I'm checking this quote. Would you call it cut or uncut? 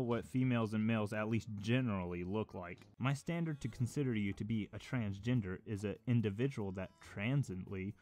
cut